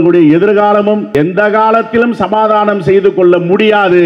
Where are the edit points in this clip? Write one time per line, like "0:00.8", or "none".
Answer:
0:01.1